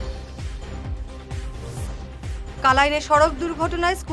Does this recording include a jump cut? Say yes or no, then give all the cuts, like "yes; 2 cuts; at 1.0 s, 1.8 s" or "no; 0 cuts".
yes; 1 cut; at 1.2 s